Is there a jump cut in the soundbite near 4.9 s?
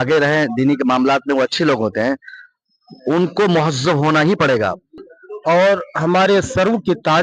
yes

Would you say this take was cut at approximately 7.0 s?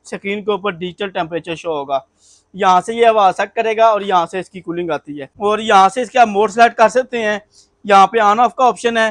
no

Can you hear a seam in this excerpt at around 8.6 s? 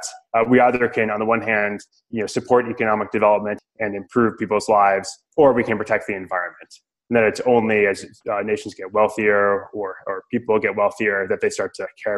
no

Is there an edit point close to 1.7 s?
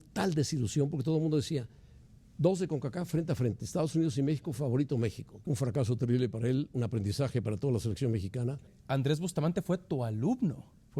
no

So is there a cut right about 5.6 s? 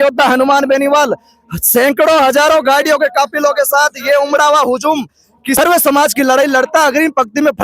yes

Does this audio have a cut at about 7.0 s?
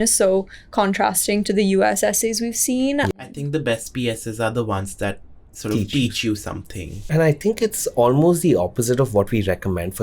yes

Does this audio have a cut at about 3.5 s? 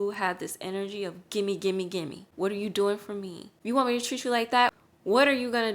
yes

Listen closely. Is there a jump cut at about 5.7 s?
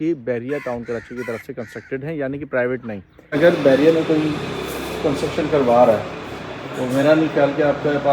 no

